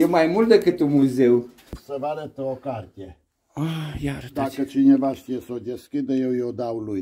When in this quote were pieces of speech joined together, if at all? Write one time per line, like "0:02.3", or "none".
0:01.8